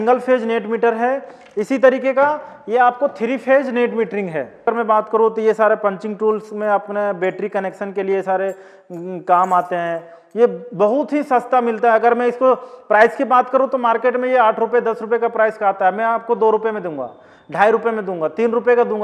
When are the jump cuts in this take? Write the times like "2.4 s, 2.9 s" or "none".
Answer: 4.7 s